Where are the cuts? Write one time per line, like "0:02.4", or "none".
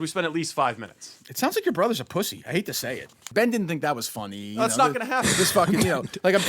0:03.3